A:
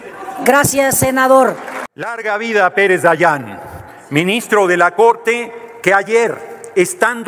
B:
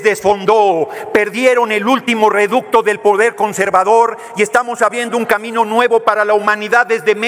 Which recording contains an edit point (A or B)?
A